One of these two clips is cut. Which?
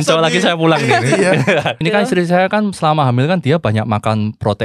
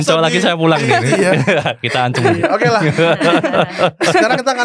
first; 1 cut; at 1.8 s

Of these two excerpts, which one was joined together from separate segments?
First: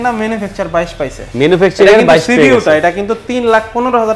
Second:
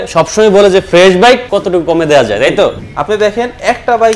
second; 2 cuts; at 1.4 s, 2.8 s

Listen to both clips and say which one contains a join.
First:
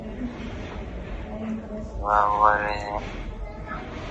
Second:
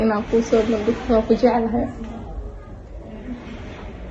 second; 1 cut; at 2.1 s

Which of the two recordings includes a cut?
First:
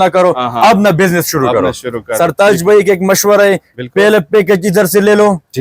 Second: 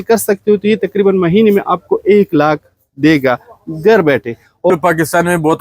second; 1 cut; at 4.7 s

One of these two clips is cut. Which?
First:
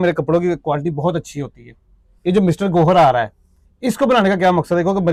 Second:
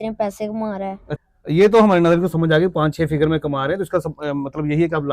second; 1 cut; at 1.1 s

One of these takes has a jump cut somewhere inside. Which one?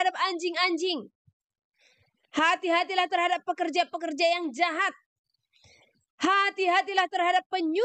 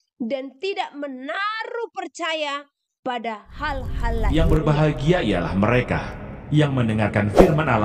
second; 1 cut; at 4.3 s

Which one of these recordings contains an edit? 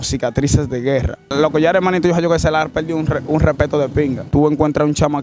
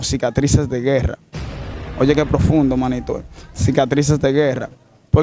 first; 2 cuts; at 1.3 s, 4.3 s

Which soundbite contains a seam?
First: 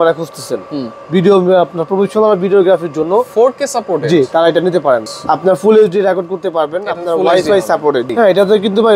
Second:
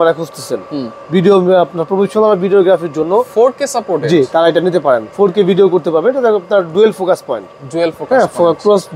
first; 2 cuts; at 5.1 s, 8.1 s

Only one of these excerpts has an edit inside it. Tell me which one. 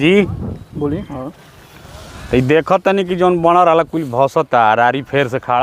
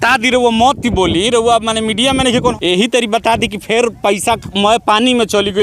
second; 1 cut; at 2.5 s

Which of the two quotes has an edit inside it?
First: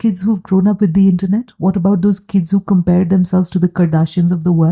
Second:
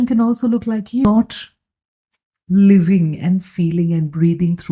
second; 1 cut; at 1.0 s

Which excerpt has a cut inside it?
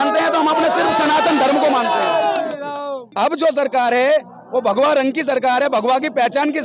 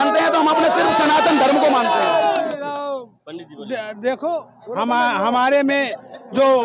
first; 1 cut; at 3.0 s

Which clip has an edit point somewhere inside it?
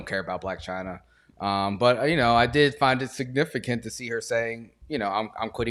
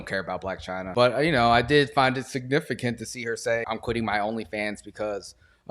second; 2 cuts; at 0.9 s, 3.6 s

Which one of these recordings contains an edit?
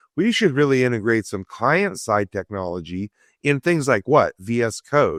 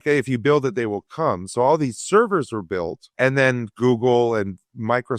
second; 1 cut; at 3.0 s

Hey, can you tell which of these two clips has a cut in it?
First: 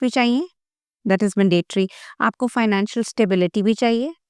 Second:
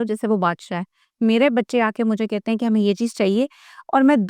second; 1 cut; at 1.1 s

